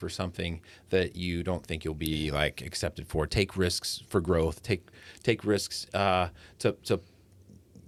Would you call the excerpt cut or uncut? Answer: uncut